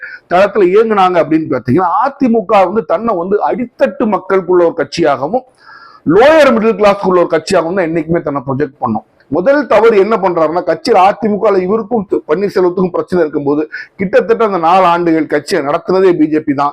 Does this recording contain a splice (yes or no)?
yes